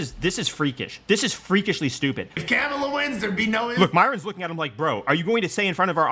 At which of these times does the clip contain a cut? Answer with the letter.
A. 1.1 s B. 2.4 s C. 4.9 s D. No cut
B